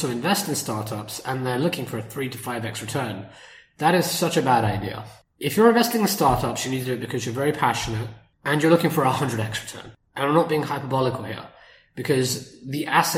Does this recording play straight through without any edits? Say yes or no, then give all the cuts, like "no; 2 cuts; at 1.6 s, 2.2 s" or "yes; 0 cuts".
yes; 0 cuts